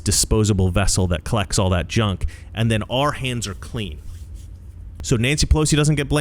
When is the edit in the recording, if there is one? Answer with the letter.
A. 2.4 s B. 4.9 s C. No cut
B